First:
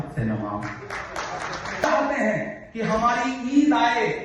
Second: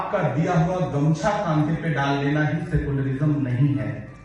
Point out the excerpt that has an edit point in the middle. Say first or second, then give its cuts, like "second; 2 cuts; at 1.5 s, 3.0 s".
first; 1 cut; at 1.9 s